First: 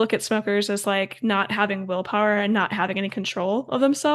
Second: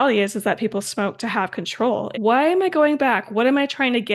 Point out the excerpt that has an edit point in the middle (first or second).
second